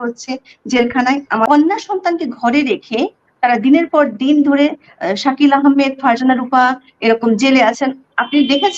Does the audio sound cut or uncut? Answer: cut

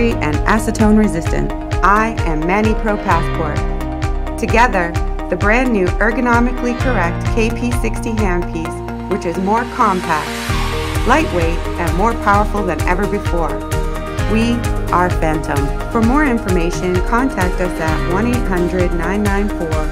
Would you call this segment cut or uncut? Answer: uncut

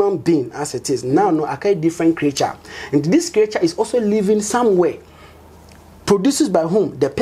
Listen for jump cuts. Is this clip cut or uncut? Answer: uncut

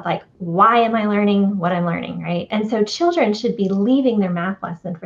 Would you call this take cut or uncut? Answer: cut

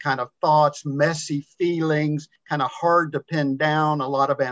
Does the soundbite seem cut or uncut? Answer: cut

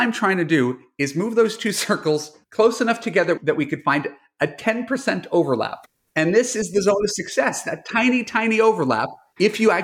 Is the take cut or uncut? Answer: uncut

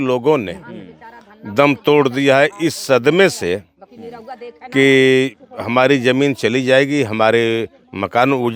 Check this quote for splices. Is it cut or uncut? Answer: uncut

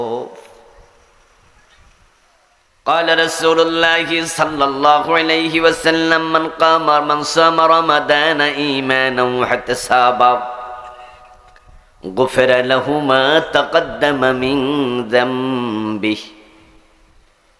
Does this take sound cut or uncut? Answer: cut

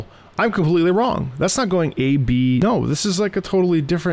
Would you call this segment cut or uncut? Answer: cut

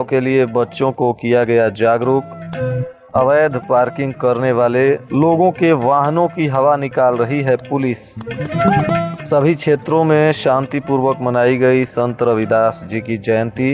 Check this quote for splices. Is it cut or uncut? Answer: uncut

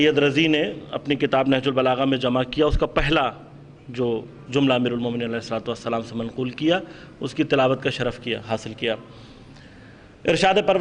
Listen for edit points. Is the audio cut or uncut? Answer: uncut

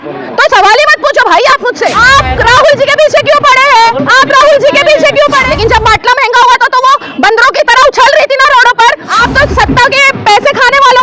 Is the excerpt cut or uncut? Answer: cut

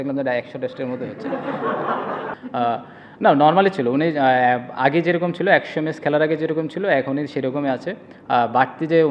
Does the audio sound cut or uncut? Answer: cut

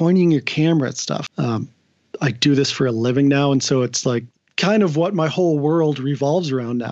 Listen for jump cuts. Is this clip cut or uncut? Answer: cut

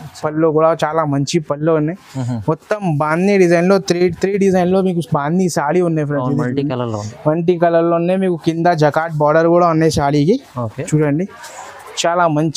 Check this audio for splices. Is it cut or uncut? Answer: uncut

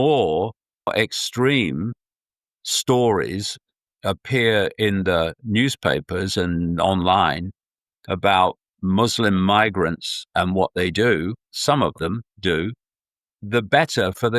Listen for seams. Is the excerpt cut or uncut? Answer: cut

